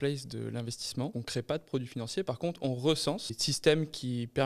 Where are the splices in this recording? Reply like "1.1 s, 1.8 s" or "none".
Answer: 1.2 s, 3.5 s